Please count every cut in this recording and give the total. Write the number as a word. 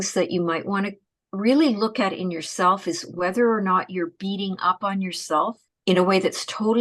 zero